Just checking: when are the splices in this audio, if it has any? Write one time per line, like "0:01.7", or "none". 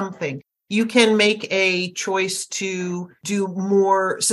0:03.1